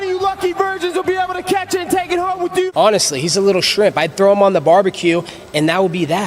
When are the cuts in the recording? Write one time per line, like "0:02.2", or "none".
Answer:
0:02.7